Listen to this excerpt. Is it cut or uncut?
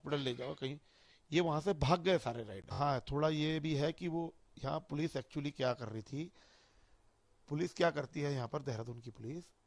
cut